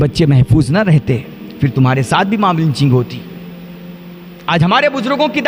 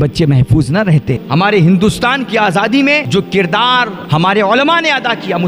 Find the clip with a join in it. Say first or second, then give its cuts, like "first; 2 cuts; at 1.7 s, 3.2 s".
second; 3 cuts; at 1.2 s, 3.0 s, 4.0 s